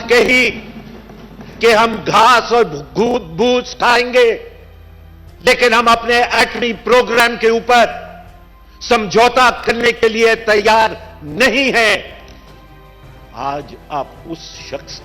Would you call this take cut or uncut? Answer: uncut